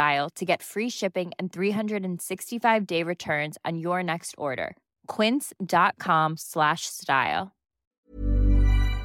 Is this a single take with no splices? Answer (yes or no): no